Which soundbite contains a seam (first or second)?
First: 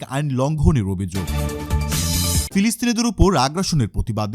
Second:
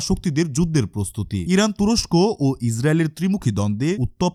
first